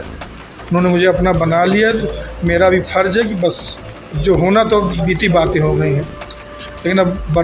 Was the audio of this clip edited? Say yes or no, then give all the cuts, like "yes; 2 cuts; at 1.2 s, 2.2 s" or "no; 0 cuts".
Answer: no; 0 cuts